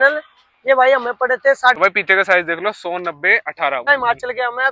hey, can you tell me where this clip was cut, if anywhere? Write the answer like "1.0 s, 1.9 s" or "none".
1.8 s, 3.9 s